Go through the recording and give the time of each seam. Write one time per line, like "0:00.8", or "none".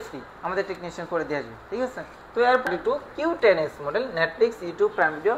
0:02.7